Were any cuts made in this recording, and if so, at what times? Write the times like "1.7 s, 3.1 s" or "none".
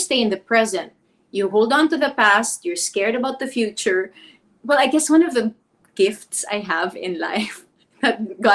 none